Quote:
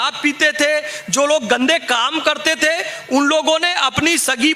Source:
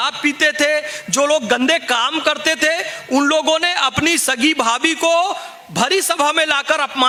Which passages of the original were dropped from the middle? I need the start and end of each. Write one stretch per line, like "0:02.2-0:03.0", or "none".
none